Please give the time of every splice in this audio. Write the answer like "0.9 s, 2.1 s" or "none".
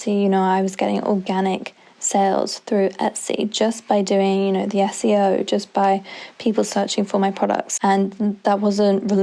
none